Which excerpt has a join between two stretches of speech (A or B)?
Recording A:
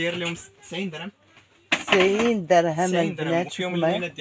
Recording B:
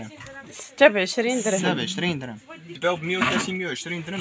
B